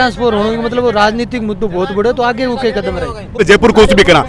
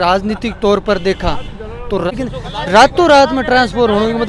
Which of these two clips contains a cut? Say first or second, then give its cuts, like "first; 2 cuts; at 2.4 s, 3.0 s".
first; 1 cut; at 3.3 s